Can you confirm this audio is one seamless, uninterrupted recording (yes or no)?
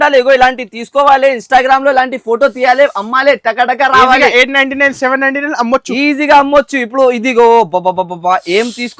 yes